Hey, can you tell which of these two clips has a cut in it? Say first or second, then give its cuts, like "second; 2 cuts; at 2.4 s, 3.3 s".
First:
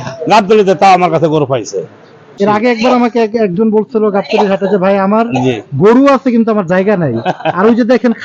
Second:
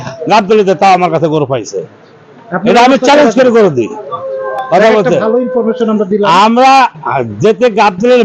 first; 1 cut; at 2.4 s